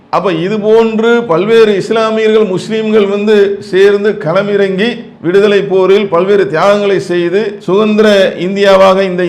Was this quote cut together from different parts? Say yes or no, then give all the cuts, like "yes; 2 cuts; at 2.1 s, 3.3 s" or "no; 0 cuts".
no; 0 cuts